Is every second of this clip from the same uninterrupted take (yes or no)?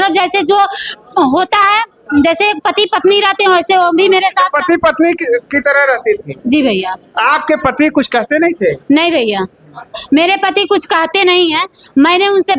yes